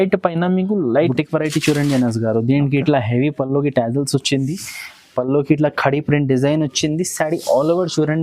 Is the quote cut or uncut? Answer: cut